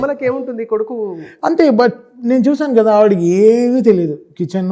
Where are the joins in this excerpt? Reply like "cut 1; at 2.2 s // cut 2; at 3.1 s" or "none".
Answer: none